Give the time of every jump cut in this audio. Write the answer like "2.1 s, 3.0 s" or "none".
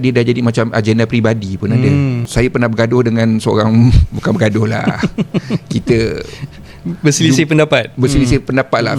2.2 s